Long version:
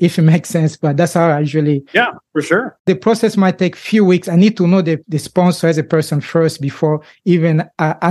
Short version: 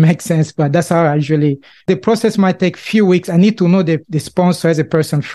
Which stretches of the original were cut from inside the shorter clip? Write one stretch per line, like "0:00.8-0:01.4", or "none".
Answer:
0:01.9-0:02.7